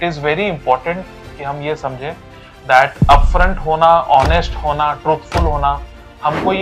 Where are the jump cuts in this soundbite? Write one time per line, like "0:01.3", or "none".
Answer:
none